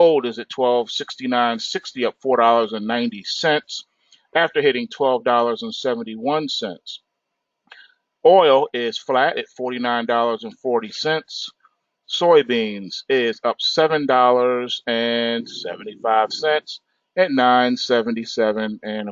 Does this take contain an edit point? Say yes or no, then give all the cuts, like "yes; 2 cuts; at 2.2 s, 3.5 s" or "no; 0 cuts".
no; 0 cuts